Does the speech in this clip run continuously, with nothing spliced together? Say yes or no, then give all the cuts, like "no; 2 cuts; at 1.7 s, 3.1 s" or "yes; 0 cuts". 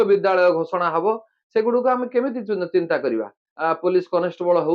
no; 1 cut; at 3.4 s